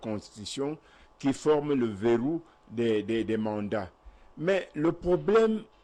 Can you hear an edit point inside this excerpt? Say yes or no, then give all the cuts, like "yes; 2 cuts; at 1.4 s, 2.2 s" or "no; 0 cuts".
no; 0 cuts